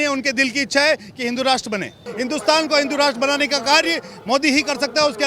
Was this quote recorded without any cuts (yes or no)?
no